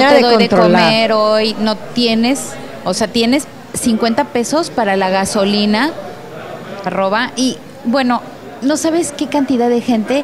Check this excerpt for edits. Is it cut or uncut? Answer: uncut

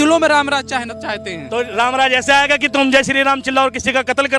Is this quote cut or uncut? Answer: uncut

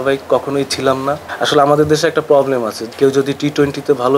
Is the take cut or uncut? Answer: cut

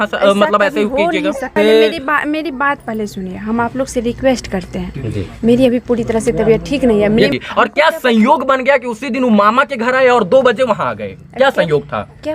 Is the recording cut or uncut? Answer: cut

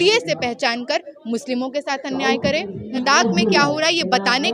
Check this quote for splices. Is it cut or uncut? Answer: cut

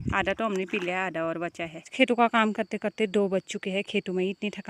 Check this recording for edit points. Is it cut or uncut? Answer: cut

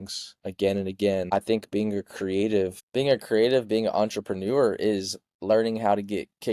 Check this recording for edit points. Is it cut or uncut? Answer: cut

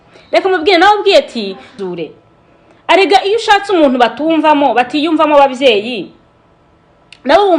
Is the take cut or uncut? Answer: cut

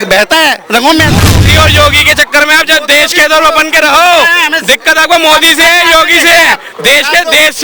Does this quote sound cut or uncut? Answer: cut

